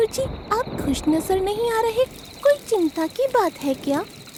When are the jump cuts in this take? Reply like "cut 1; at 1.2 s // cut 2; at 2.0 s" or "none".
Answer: none